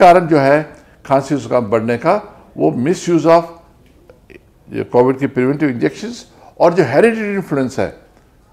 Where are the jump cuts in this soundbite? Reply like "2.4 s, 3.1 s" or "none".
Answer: none